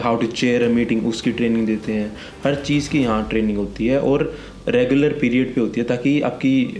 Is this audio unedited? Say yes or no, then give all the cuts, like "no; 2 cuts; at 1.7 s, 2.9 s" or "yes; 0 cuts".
yes; 0 cuts